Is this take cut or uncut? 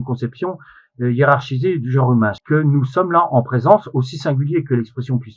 cut